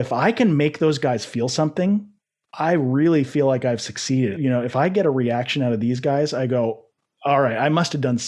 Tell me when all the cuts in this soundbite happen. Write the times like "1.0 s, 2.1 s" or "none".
2.5 s, 4.4 s

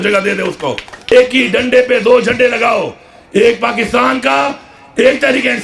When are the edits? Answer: 1.1 s

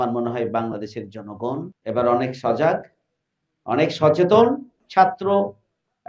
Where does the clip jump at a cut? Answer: 1.7 s, 4.8 s

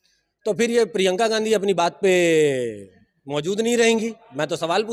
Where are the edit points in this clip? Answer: none

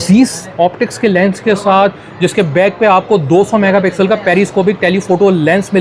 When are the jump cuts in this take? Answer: none

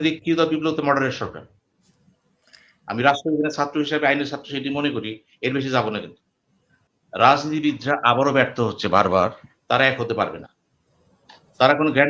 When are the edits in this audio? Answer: 6.8 s

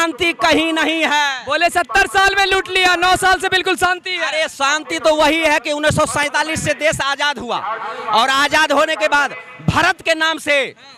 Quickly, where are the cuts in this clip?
none

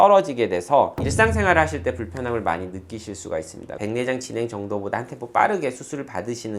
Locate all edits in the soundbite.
3.8 s

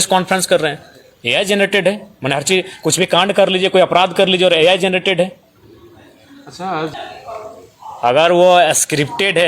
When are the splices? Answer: 6.9 s

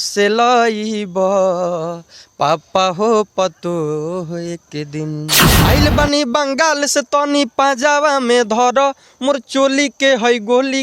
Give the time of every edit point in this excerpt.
5.5 s

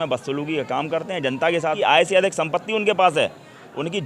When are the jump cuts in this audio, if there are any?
1.7 s

